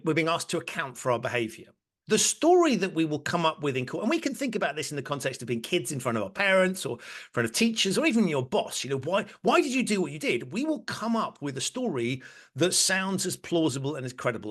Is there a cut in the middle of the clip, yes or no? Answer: no